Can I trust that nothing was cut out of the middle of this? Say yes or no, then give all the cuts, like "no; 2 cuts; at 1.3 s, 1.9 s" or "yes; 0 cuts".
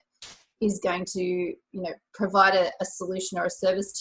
yes; 0 cuts